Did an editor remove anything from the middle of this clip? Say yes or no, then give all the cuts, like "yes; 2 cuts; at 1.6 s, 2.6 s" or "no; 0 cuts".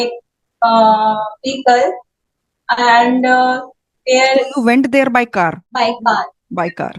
yes; 1 cut; at 5.7 s